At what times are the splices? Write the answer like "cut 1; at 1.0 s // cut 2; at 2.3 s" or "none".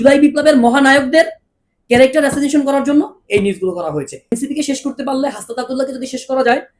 cut 1; at 4.3 s